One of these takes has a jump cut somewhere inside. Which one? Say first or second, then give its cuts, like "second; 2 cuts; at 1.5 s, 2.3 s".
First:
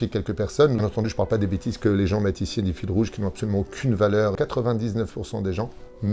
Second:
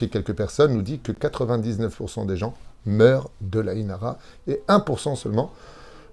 first; 2 cuts; at 0.8 s, 4.3 s